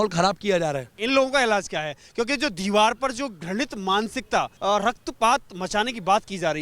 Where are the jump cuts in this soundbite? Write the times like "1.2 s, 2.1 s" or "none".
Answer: 1.0 s, 4.5 s

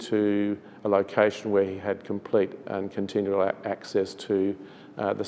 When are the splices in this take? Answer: none

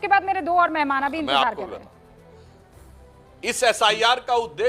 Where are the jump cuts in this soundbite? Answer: 2.2 s

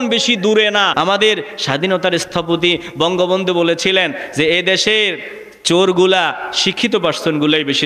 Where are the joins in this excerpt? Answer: 0.9 s

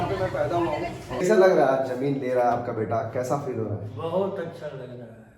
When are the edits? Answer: 1.2 s

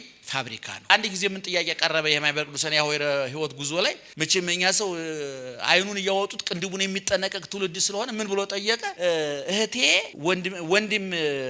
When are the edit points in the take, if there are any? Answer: 0.9 s, 4.0 s, 8.9 s, 10.1 s

